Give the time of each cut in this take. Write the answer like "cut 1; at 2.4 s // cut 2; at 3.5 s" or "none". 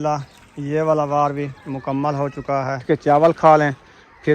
cut 1; at 2.8 s